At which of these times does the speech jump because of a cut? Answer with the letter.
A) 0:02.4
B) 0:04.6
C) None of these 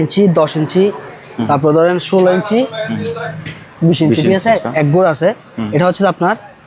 B